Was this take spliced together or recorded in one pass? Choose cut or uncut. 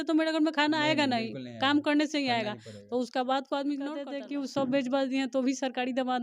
cut